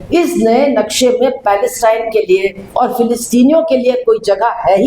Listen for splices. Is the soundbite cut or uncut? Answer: uncut